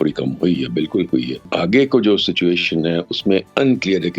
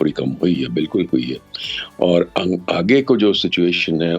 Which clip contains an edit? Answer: first; 1 cut; at 1.5 s

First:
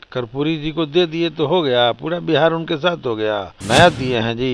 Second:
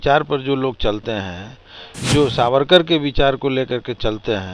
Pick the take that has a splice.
first; 1 cut; at 3.5 s

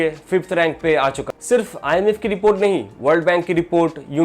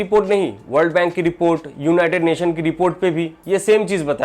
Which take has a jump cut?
first; 1 cut; at 1.3 s

